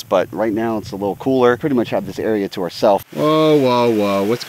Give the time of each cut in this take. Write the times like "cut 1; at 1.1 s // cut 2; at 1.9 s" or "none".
cut 1; at 1.6 s // cut 2; at 3.1 s